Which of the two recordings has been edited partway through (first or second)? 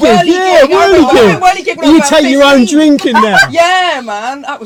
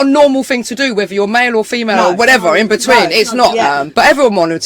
second